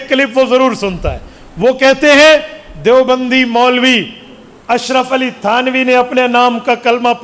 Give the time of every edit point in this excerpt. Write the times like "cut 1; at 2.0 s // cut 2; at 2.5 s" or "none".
none

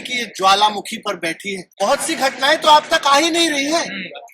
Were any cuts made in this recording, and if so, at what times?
cut 1; at 1.6 s

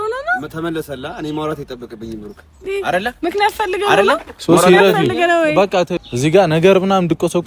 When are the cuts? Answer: cut 1; at 6.0 s

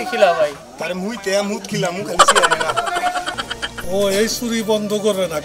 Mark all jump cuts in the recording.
cut 1; at 3.4 s

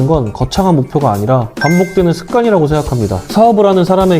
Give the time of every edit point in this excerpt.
cut 1; at 3.2 s

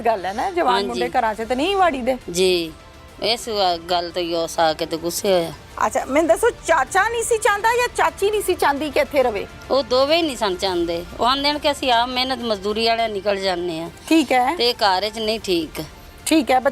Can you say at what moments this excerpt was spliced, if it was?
none

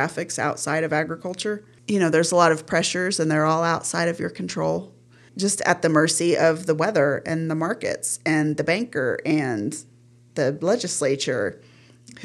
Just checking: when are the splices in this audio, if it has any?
cut 1; at 1.7 s // cut 2; at 5.3 s

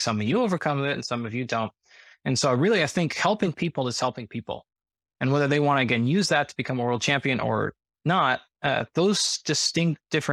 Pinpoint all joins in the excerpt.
none

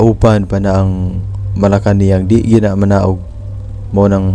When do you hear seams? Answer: none

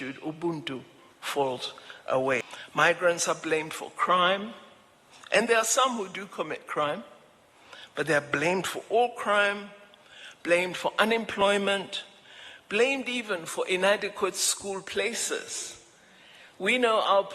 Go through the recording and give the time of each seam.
cut 1; at 2.4 s

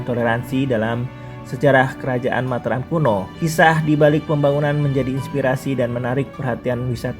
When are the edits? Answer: cut 1; at 3.3 s

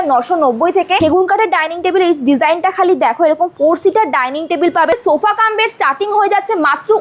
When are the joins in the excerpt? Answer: cut 1; at 1.0 s // cut 2; at 4.9 s

